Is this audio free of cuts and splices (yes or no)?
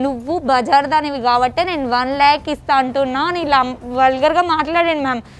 yes